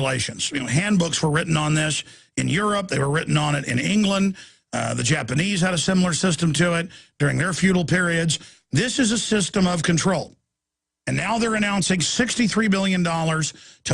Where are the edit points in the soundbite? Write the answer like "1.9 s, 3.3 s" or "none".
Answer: 1.3 s